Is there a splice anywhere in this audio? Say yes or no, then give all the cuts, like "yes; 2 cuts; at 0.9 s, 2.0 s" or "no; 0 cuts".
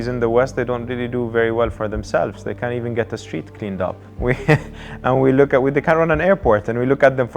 no; 0 cuts